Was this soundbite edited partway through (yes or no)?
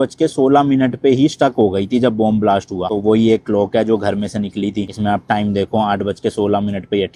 no